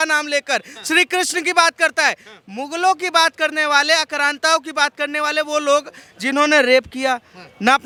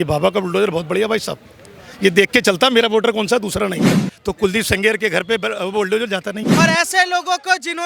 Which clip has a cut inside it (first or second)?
second